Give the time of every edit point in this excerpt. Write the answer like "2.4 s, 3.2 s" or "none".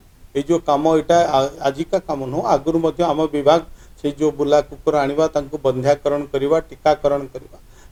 none